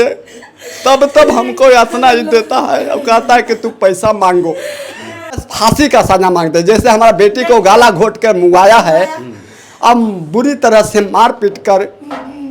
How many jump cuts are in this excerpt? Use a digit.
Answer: 1